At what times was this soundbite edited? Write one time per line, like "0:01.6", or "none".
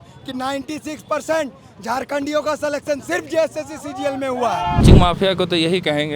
0:04.8